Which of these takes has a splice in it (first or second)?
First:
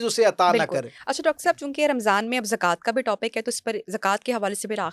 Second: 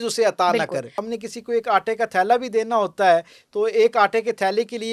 second